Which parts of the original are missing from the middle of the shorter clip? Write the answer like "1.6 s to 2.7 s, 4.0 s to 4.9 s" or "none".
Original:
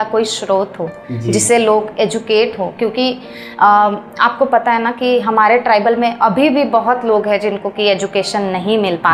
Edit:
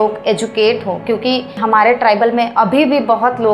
3.3 s to 5.2 s